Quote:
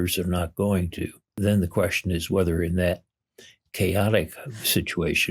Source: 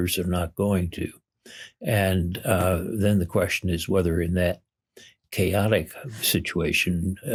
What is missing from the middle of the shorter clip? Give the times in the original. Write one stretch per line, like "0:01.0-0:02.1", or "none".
0:01.3-0:02.9